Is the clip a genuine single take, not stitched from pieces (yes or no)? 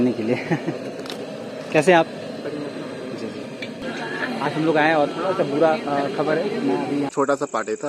no